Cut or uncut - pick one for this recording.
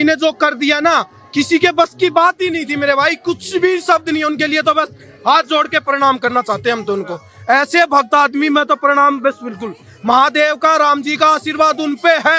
uncut